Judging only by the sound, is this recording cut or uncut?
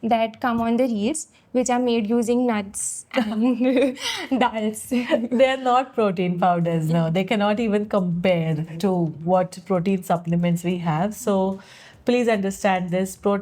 cut